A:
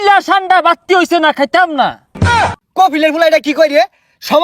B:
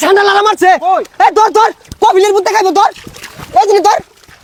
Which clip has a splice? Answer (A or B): A